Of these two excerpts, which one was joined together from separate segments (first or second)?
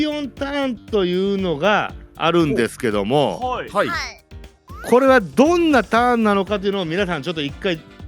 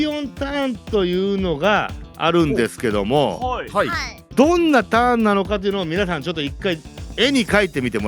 second